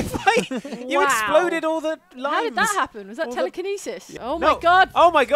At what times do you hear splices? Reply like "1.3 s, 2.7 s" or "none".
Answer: 4.1 s